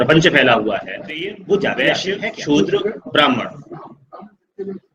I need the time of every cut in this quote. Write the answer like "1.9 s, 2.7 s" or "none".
1.9 s